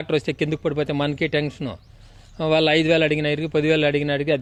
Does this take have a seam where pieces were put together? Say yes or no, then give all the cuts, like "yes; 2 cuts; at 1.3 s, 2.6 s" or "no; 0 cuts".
no; 0 cuts